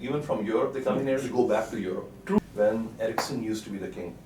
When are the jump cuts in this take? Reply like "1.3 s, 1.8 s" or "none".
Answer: 2.4 s

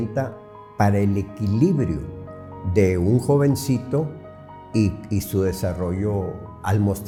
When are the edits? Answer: none

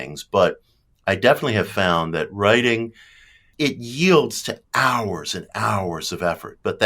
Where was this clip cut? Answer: 3.5 s

